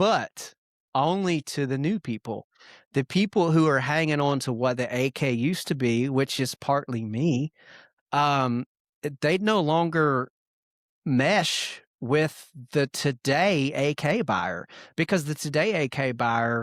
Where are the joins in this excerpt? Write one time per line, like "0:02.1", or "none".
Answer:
none